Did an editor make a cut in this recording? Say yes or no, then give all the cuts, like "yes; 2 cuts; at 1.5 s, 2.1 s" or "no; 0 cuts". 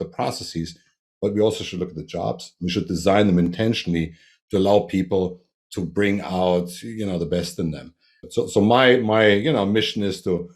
yes; 1 cut; at 8.2 s